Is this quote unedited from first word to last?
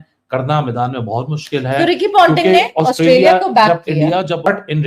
yes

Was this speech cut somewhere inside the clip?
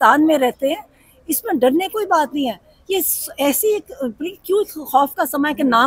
no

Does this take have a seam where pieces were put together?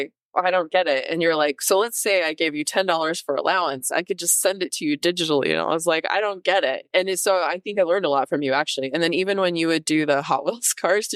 no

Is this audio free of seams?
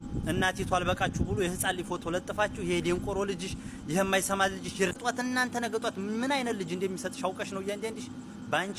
no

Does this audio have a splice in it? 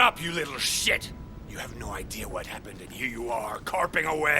no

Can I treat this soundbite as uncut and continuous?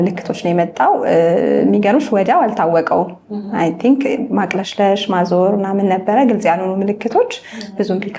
yes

